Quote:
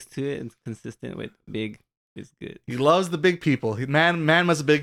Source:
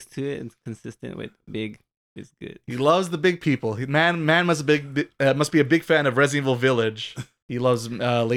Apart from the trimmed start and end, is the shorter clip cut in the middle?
no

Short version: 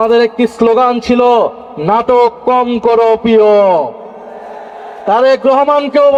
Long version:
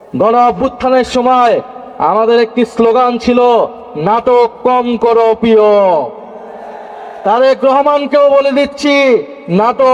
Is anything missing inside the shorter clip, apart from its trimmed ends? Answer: no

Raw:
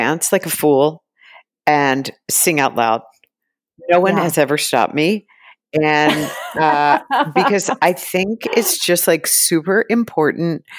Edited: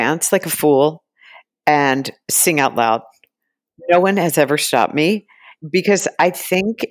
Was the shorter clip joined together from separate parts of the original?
yes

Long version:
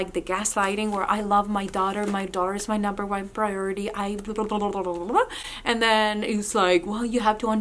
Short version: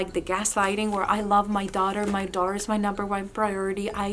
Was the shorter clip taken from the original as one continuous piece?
yes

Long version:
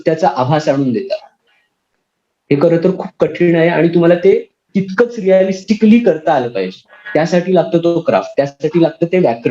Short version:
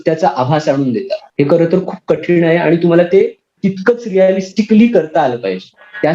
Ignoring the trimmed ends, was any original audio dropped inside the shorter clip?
yes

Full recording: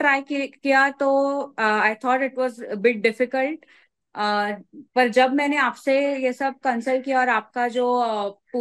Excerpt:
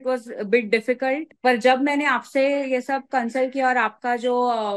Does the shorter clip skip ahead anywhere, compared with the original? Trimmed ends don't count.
yes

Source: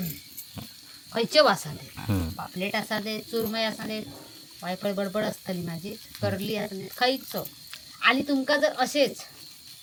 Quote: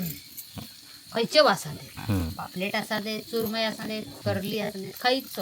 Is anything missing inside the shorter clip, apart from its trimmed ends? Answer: yes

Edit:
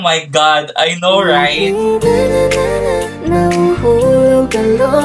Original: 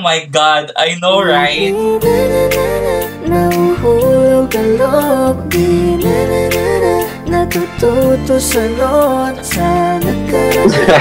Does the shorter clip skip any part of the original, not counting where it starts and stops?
no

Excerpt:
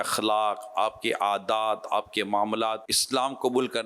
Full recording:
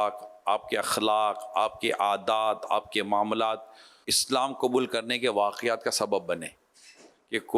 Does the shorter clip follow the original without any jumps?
no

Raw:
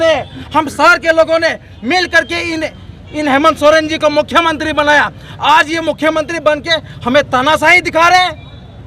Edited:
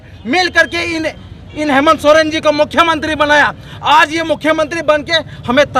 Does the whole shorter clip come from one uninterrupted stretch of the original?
yes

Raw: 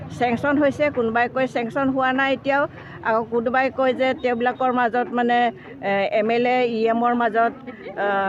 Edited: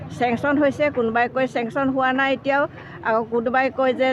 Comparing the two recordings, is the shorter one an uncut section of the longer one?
yes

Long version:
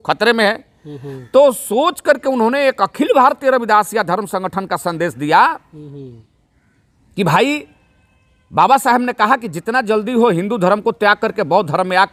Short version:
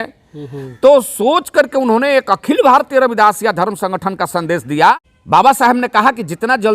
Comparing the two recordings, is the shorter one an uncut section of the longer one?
no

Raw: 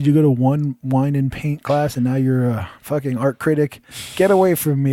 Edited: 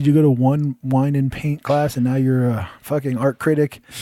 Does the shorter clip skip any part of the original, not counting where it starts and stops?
no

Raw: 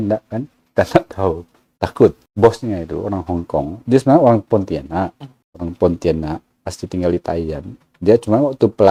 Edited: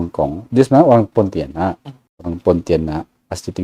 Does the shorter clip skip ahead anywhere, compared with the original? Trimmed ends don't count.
no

